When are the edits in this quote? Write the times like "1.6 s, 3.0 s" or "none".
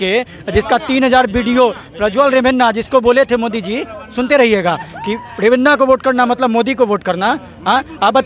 none